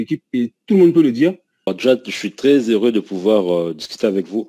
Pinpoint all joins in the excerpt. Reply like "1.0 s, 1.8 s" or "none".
1.7 s